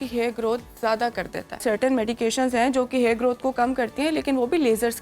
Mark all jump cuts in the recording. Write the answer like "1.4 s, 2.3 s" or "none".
1.6 s